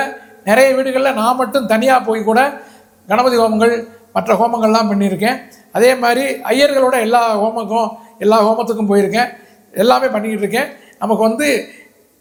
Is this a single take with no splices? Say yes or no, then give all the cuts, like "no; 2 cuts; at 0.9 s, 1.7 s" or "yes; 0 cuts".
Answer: yes; 0 cuts